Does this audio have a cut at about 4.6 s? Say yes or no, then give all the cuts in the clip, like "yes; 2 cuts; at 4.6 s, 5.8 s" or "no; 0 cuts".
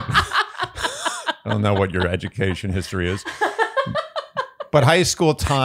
yes; 1 cut; at 4.6 s